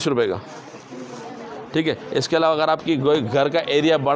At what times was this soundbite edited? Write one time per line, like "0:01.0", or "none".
none